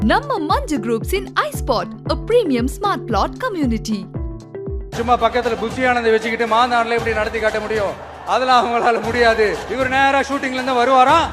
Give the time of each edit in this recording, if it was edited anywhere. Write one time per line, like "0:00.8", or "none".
0:04.9
0:09.6